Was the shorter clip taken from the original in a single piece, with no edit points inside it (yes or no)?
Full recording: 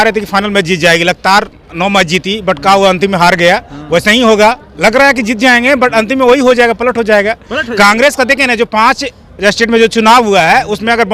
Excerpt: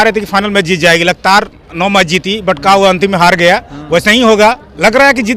yes